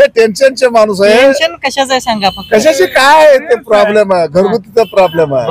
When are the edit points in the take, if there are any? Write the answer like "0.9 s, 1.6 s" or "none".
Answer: none